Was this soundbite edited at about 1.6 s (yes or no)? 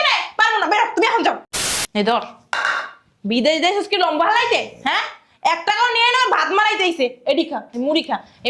yes